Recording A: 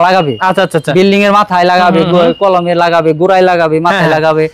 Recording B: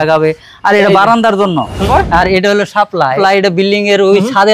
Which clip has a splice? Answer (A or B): B